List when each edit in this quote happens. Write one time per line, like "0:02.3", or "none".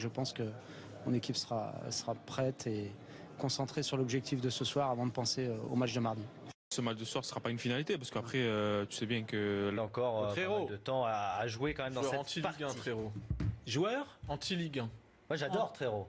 none